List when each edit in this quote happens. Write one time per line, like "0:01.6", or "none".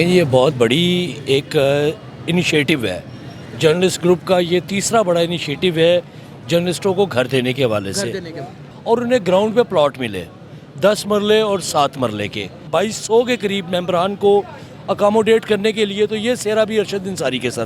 0:08.6
0:12.7

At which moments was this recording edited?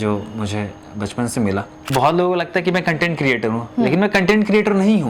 0:01.8

